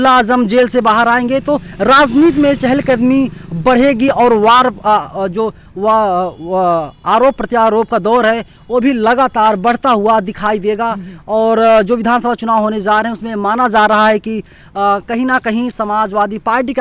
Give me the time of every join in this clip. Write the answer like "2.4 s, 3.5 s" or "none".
none